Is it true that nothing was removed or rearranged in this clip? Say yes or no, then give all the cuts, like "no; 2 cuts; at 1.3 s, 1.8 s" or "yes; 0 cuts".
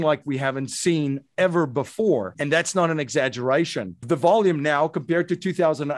no; 2 cuts; at 2.4 s, 4.0 s